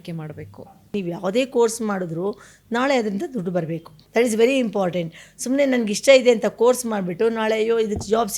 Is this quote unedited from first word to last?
no; 2 cuts; at 0.9 s, 3.9 s

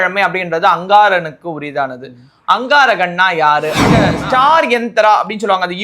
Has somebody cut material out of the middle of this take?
yes; 1 cut; at 4.1 s

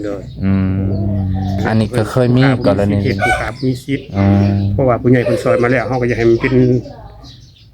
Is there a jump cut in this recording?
yes; 1 cut; at 1.6 s

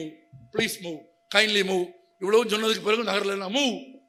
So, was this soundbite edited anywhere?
no; 0 cuts

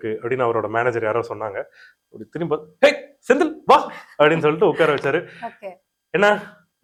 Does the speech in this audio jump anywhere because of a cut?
no; 0 cuts

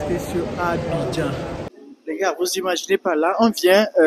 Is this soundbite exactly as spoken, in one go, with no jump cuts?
no; 1 cut; at 1.7 s

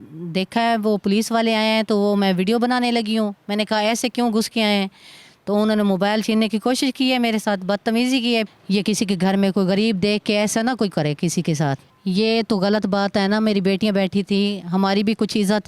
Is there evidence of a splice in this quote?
yes; 2 cuts; at 8.5 s, 11.9 s

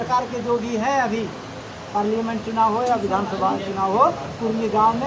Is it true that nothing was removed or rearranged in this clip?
yes; 0 cuts

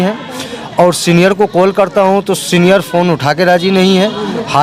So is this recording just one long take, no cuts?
yes; 0 cuts

